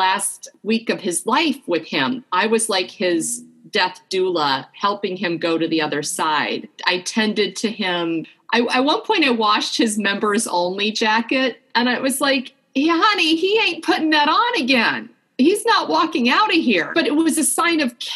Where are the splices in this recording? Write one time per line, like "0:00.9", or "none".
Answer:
0:06.7
0:08.3
0:16.9